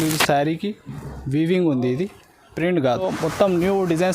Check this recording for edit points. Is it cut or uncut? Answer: cut